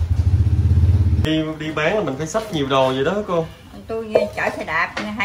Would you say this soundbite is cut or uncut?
cut